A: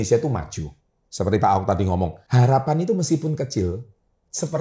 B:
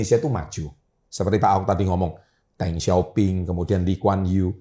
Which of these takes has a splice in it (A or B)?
A